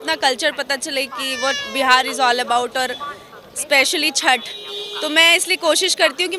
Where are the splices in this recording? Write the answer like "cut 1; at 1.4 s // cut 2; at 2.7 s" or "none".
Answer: none

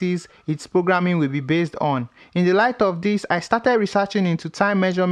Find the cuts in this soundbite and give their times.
none

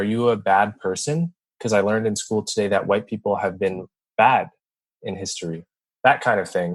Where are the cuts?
cut 1; at 5.8 s

